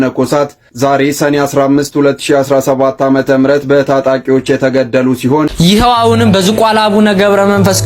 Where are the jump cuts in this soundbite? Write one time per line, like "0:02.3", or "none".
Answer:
0:05.5